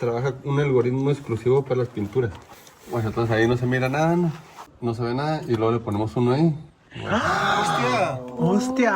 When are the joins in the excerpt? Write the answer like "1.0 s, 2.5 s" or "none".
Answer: 2.8 s, 4.7 s